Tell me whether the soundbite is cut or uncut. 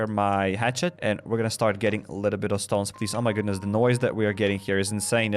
cut